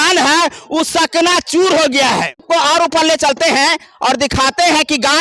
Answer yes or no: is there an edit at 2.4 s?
yes